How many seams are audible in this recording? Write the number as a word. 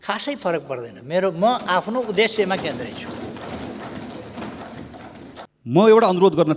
zero